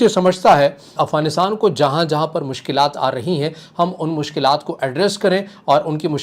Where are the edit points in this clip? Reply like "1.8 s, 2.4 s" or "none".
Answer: 0.9 s